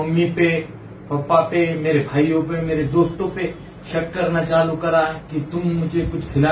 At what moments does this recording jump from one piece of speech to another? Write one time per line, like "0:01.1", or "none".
none